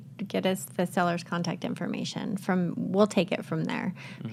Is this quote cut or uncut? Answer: uncut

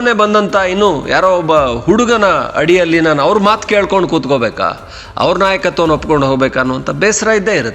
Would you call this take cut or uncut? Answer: uncut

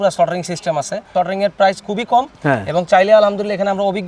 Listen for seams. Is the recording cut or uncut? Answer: cut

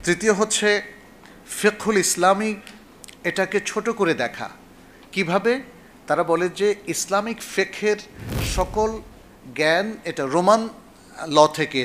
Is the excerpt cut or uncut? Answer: uncut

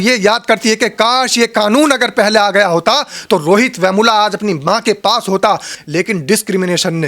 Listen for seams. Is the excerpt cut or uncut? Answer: cut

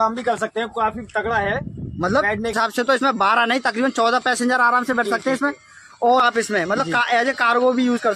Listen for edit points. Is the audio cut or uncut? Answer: cut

